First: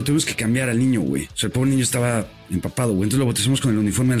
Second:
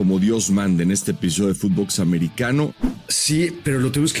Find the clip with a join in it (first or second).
second